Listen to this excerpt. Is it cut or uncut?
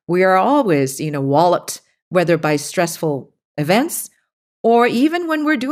uncut